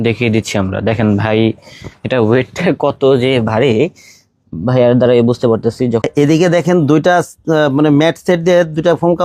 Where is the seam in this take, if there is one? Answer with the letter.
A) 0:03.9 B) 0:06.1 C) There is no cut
B